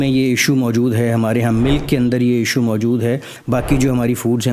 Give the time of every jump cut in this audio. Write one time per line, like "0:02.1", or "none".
none